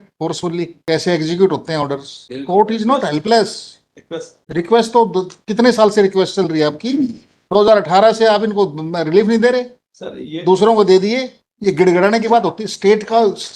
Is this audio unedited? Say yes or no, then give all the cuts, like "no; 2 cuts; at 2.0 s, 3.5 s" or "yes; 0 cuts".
no; 1 cut; at 11.3 s